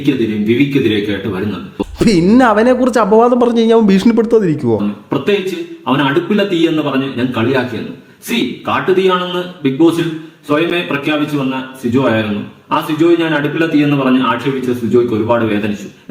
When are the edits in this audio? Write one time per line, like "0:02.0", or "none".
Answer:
0:01.8
0:04.8

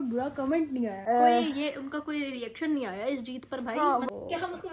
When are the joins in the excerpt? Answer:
0:01.0
0:04.1

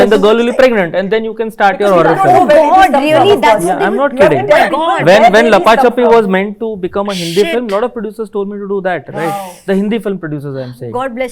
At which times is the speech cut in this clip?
none

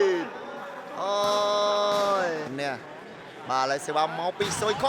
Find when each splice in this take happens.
0:02.5

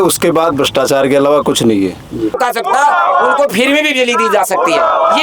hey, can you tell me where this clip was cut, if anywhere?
0:02.4

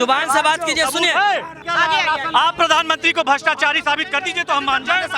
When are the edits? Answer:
0:01.6

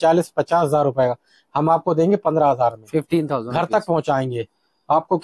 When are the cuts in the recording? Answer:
none

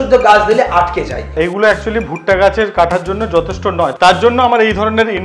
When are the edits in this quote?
0:01.3
0:03.9

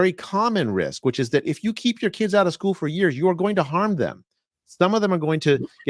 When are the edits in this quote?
none

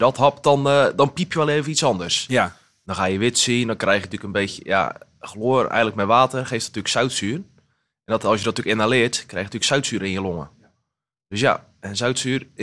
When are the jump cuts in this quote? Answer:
none

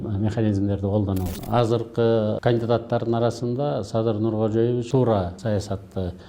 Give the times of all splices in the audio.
0:01.3
0:02.4
0:05.0

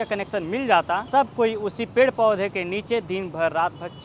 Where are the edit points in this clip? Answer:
0:01.0

